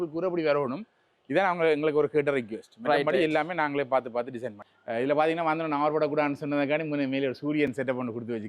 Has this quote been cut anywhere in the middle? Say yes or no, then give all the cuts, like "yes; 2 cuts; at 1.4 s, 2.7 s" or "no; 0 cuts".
no; 0 cuts